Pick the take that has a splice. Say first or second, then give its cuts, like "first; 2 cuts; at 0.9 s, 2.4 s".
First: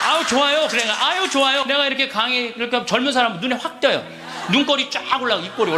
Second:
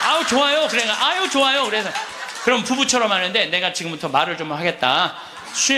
first; 1 cut; at 1.7 s